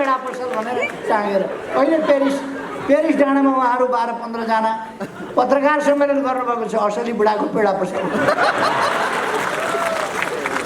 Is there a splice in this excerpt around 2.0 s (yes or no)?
no